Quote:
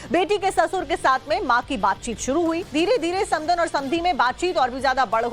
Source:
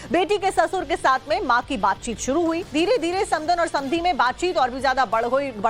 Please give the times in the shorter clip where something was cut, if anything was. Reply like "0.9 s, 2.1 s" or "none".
none